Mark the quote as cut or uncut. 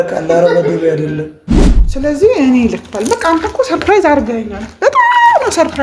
cut